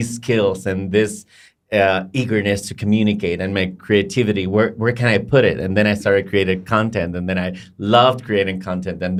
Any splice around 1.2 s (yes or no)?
no